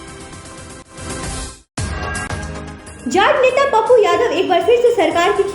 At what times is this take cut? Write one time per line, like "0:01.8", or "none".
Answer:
0:00.9
0:02.4